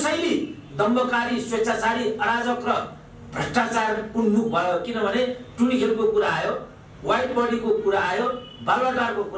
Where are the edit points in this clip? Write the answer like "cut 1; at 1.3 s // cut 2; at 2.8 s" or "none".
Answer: none